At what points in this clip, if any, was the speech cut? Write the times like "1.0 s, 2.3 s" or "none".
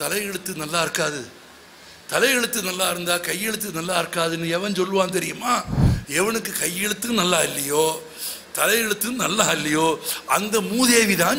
none